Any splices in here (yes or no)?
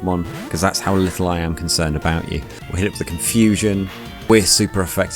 yes